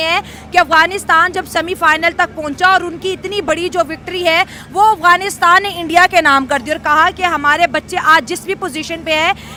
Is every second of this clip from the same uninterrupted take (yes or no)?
yes